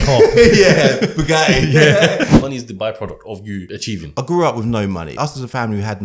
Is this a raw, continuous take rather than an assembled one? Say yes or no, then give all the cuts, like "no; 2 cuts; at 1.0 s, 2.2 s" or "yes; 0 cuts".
no; 3 cuts; at 2.3 s, 4.0 s, 5.2 s